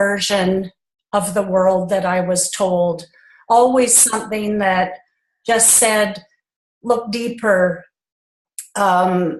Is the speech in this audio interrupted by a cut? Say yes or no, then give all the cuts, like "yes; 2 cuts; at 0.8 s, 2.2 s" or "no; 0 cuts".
yes; 1 cut; at 8.4 s